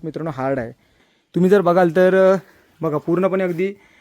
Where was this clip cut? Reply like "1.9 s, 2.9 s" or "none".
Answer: 1.0 s